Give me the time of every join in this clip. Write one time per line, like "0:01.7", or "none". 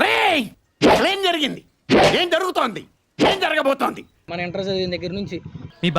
0:04.3